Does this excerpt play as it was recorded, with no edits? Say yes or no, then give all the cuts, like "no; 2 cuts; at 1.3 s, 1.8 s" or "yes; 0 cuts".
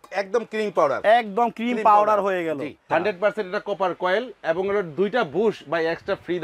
no; 1 cut; at 2.8 s